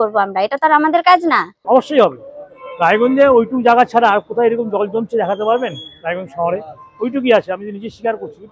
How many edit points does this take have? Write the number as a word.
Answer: one